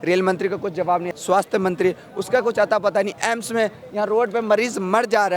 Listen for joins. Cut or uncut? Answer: cut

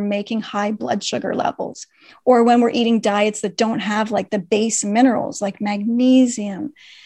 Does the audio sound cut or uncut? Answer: uncut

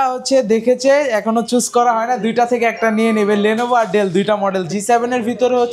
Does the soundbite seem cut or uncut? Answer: cut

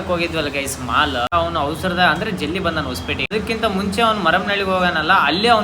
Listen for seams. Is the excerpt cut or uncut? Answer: cut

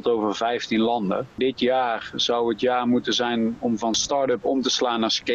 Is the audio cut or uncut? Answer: cut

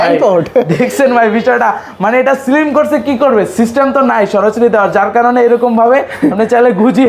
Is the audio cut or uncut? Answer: uncut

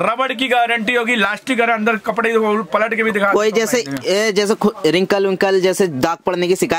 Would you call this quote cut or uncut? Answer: uncut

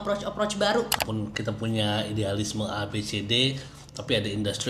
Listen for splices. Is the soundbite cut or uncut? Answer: cut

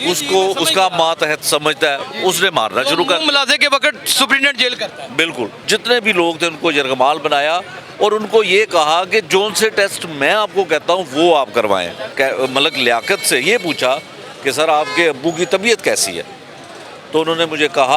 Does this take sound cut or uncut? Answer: cut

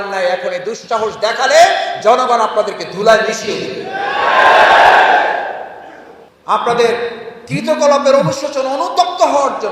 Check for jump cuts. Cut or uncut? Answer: cut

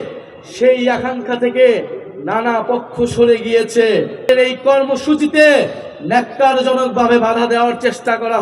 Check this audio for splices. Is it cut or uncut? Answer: cut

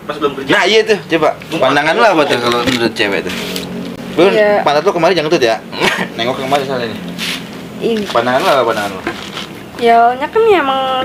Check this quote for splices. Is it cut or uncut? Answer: uncut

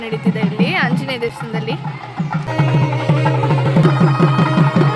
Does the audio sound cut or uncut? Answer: cut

